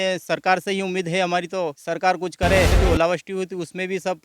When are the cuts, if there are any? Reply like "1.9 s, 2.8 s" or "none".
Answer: 1.8 s, 2.8 s